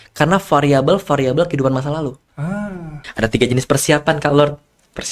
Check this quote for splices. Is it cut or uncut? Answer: cut